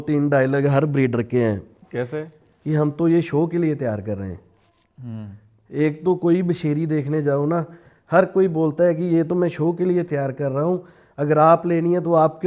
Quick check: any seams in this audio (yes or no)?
no